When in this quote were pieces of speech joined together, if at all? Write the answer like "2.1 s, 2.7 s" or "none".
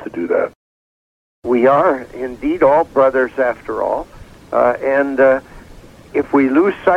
1.1 s